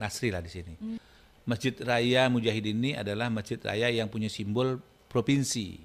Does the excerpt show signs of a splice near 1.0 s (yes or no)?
yes